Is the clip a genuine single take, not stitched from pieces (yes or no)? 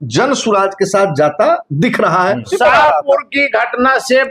no